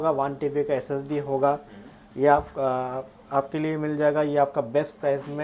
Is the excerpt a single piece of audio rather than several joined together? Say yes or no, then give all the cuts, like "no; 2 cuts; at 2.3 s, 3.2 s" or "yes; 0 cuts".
yes; 0 cuts